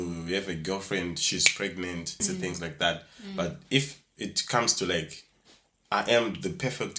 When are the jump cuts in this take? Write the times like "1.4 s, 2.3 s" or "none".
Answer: 2.2 s